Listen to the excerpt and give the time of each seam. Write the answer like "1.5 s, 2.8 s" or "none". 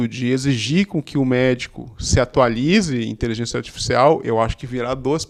none